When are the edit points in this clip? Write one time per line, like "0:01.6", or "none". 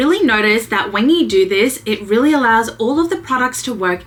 none